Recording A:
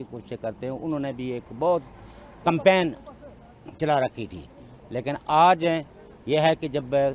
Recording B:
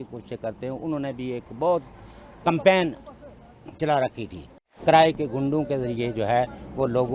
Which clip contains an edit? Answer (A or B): B